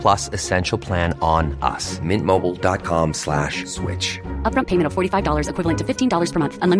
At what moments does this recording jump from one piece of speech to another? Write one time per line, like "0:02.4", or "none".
none